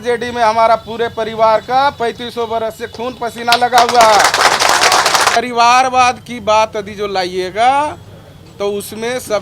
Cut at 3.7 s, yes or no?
no